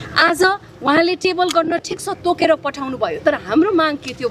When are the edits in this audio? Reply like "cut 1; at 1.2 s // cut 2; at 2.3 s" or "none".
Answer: none